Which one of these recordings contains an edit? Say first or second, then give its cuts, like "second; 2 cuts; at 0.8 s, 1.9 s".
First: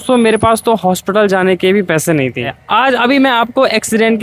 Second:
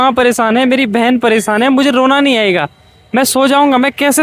first; 1 cut; at 2.6 s